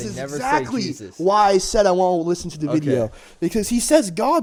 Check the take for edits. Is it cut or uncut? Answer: uncut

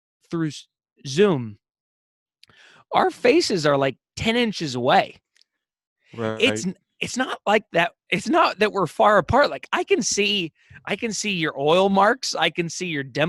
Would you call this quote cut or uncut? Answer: uncut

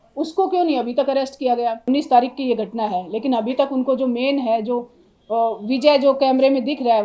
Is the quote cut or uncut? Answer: cut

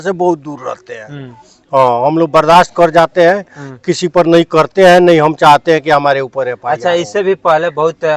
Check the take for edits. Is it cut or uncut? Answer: uncut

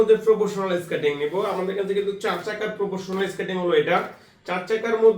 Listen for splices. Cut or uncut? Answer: uncut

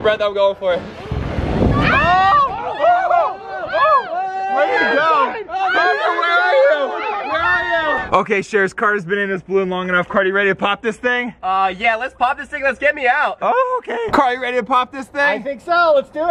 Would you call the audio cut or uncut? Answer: cut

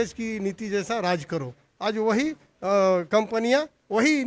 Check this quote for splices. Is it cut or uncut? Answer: uncut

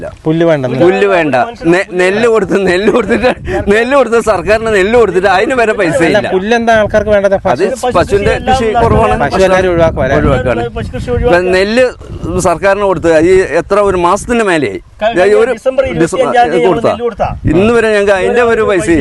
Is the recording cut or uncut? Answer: uncut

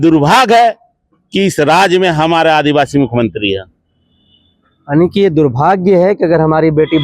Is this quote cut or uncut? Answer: uncut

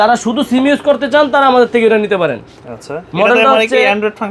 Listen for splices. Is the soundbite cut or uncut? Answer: uncut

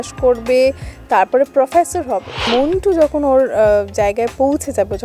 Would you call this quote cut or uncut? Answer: cut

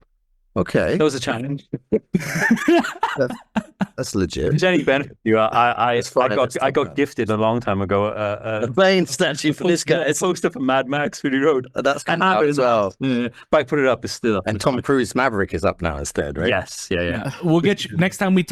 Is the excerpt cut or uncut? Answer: uncut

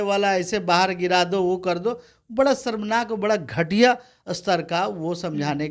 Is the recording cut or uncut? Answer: uncut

